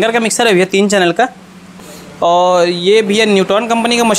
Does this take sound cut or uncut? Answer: cut